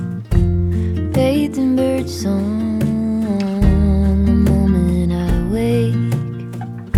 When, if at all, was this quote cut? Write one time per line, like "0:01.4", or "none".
none